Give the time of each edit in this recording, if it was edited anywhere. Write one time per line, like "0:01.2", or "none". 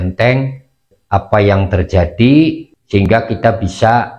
0:02.7

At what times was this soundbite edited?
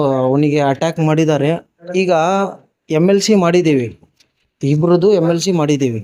0:01.8

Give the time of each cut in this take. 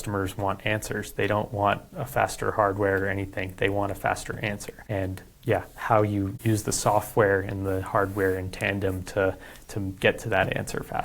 0:04.7
0:06.3

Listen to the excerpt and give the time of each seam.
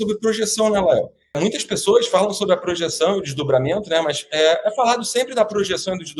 0:01.4

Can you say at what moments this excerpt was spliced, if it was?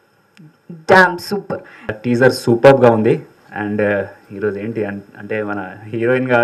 0:02.0

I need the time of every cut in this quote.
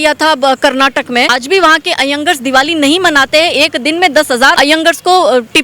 0:01.3
0:04.6

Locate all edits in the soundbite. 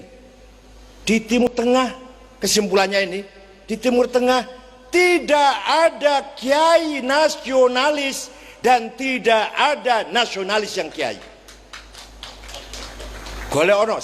0:01.4

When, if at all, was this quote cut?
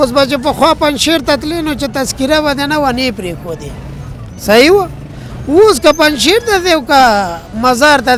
none

